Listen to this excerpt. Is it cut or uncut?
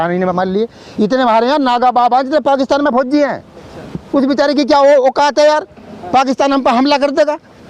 uncut